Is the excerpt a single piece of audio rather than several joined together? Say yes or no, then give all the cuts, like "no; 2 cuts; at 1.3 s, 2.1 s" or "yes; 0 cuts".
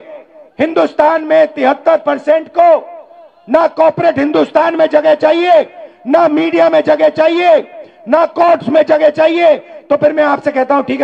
yes; 0 cuts